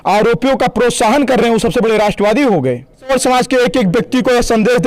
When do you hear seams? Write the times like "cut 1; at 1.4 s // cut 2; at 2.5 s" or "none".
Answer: cut 1; at 3.1 s